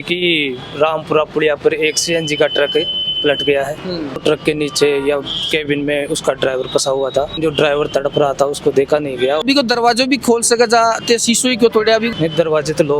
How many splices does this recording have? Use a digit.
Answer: 3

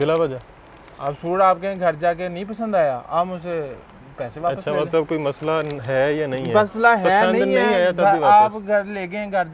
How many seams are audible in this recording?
0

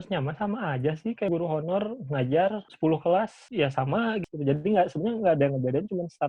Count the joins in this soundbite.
4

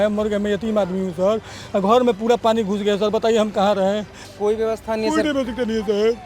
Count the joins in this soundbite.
1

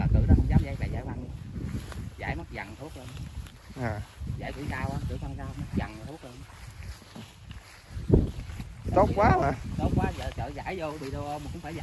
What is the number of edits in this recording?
0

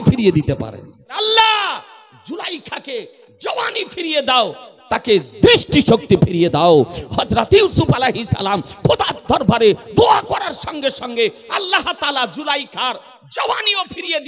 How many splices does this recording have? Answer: 1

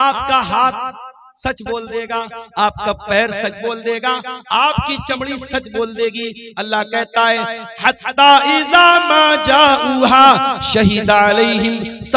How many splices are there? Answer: 0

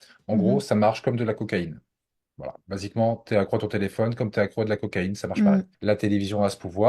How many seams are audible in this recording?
1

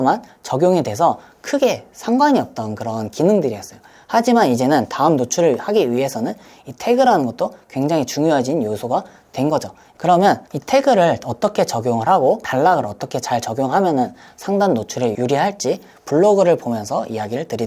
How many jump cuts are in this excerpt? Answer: 3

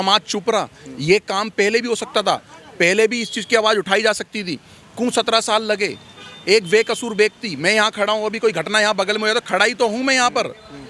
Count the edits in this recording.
0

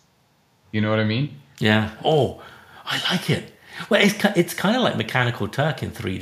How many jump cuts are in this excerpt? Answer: 1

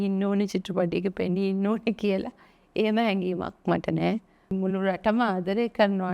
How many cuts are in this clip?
1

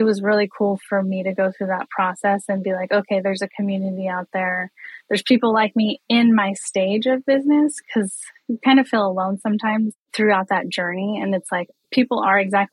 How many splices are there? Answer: 3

